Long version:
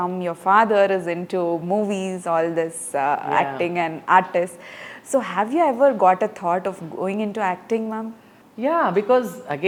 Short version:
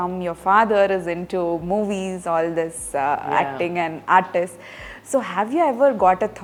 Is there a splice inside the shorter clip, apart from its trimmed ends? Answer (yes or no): no